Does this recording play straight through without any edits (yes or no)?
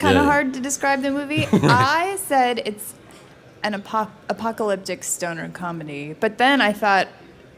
yes